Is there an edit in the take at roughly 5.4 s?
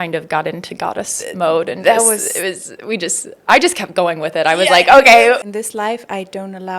yes; 1 cut; at 5.4 s

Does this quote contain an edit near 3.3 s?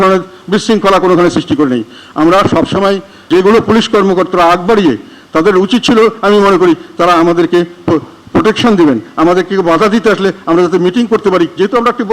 yes; 1 cut; at 3.3 s

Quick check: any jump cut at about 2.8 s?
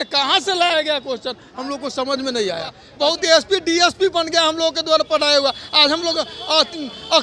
yes; 1 cut; at 2.8 s

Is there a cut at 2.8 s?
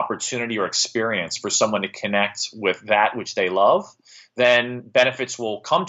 no; 0 cuts

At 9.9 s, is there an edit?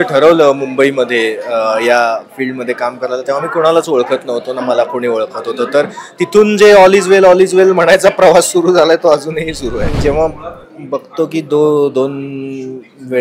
yes; 1 cut; at 9.9 s

